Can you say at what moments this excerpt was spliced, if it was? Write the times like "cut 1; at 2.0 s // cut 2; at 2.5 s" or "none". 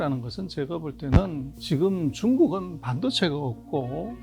cut 1; at 1.5 s